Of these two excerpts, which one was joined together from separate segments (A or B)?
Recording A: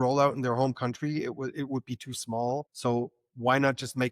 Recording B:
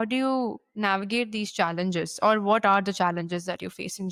A